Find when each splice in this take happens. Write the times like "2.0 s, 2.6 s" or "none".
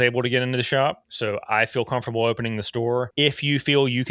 1.1 s, 3.1 s